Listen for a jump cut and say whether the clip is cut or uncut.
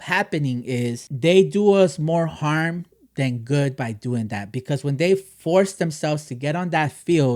cut